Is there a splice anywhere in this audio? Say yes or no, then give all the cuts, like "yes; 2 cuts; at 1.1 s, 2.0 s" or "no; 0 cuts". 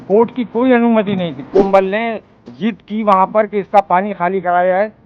yes; 1 cut; at 1.7 s